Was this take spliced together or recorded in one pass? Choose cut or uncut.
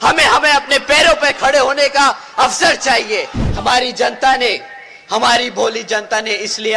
cut